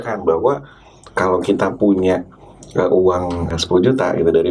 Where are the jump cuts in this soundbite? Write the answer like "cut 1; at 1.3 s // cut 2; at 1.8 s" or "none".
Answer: cut 1; at 3.5 s